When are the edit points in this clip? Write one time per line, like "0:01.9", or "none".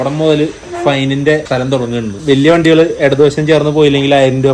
0:01.7